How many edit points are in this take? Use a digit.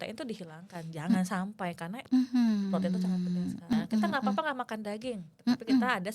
1